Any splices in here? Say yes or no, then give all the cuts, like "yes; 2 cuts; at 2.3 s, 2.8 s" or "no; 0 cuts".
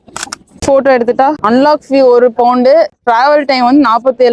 yes; 2 cuts; at 1.4 s, 2.9 s